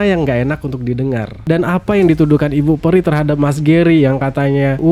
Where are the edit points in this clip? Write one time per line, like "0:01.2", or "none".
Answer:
0:01.4